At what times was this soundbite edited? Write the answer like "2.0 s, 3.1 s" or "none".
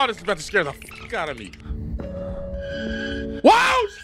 none